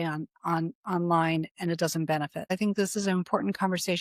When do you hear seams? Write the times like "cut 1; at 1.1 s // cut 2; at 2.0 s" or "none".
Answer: cut 1; at 2.6 s

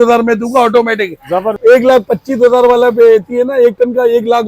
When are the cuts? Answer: cut 1; at 1.5 s

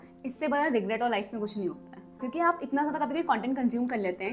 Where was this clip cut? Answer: cut 1; at 2.2 s

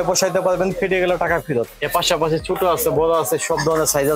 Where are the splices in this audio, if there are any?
cut 1; at 1.8 s

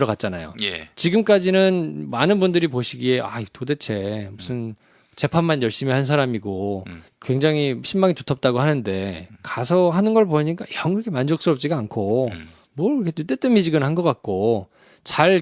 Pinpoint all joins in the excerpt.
cut 1; at 6.0 s

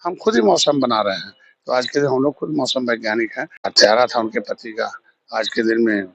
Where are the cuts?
cut 1; at 3.6 s

